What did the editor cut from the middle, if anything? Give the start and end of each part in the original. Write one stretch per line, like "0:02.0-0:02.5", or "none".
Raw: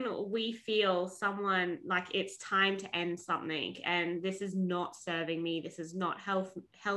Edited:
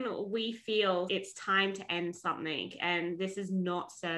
0:01.1-0:02.1